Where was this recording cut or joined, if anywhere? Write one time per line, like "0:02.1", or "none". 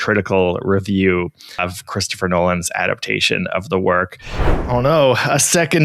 0:04.5